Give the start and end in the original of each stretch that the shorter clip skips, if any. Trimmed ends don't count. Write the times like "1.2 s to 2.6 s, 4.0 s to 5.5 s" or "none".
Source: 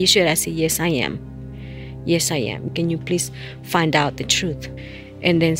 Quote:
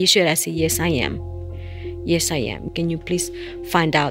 none